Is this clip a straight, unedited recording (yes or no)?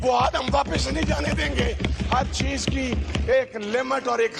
yes